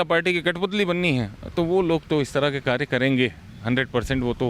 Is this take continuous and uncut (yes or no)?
yes